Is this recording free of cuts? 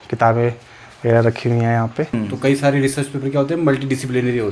no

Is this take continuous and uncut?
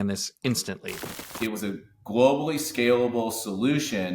no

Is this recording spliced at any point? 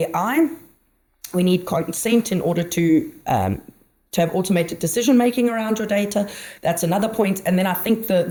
no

